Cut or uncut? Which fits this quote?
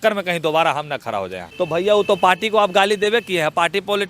cut